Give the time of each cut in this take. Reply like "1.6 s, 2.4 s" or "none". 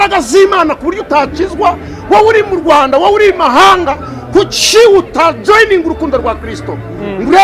none